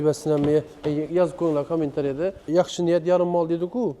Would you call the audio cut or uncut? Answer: cut